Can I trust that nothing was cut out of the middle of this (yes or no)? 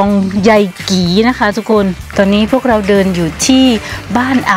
no